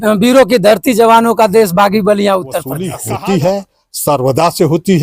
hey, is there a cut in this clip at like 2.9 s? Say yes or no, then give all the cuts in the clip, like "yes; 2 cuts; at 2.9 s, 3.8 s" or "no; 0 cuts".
yes; 1 cut; at 2.9 s